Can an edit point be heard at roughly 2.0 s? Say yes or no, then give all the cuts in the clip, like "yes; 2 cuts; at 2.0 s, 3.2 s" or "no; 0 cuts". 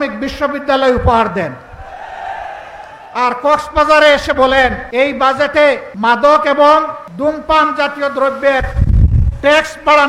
no; 3 cuts; at 4.8 s, 5.9 s, 7.0 s